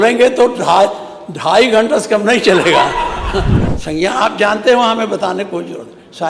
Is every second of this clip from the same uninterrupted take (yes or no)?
no